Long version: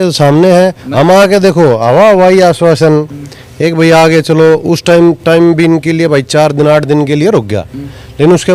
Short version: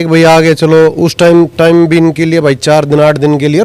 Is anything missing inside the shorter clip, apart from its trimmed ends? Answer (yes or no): no